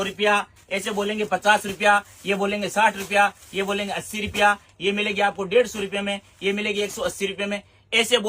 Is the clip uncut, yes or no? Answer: yes